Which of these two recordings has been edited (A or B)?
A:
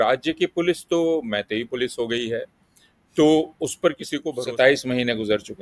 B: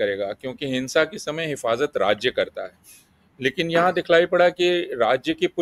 A